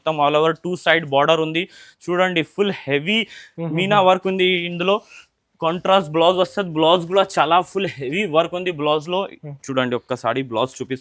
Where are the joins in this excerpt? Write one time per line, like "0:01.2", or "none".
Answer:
none